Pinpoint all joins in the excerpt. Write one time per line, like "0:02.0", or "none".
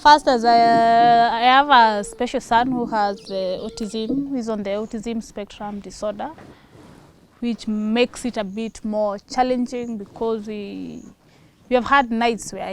none